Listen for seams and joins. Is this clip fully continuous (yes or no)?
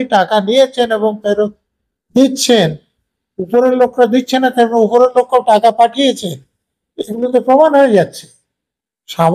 yes